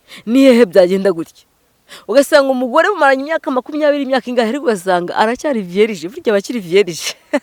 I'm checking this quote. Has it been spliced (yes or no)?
no